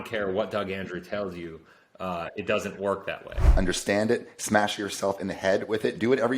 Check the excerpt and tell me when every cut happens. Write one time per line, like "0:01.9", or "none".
0:03.4

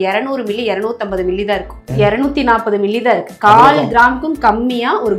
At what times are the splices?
0:01.9

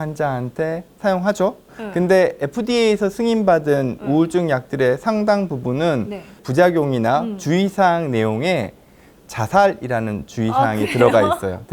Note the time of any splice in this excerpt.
0:01.8
0:06.4

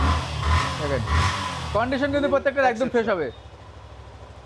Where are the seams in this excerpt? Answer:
none

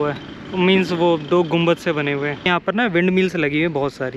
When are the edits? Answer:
0:02.5

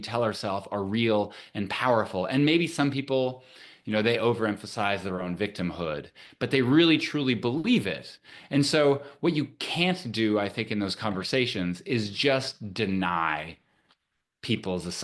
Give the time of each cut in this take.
none

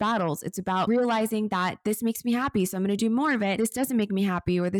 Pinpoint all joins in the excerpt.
none

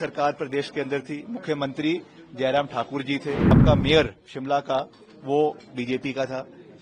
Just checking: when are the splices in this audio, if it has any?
0:03.6

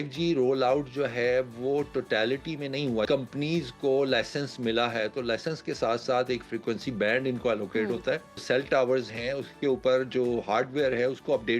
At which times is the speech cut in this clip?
0:03.1
0:08.4

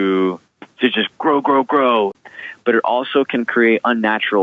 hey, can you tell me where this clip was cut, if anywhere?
0:02.2

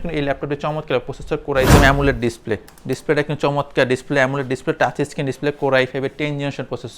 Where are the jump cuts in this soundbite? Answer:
0:01.7

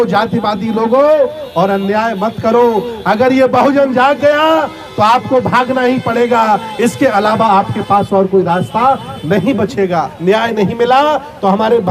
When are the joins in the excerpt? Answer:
0:10.1

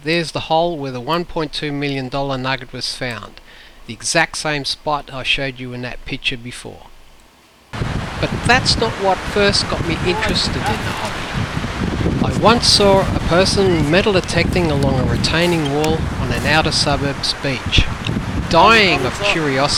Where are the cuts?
none

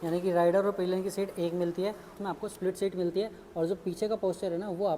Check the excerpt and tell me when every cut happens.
0:02.1

